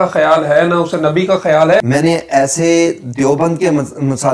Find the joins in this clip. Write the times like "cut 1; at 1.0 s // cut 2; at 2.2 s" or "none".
cut 1; at 1.8 s